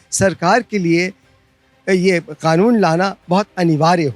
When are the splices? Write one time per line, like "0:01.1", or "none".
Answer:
none